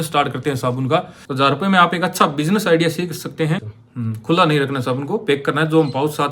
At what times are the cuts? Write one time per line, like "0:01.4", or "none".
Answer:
0:01.2
0:03.8